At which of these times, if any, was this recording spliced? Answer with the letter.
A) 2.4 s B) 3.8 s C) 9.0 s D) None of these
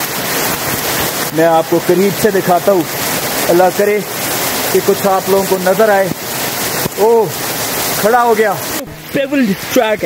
C